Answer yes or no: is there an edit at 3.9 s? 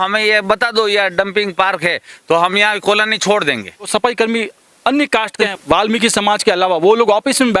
yes